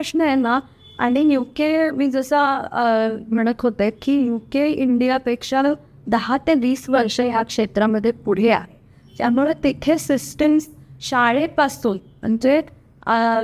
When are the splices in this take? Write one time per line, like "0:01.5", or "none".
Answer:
none